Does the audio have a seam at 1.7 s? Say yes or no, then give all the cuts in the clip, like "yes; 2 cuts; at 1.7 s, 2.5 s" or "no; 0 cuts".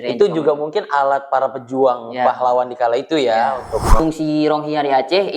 no; 1 cut; at 4.0 s